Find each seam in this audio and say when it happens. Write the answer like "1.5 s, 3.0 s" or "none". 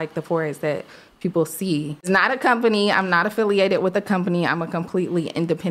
2.1 s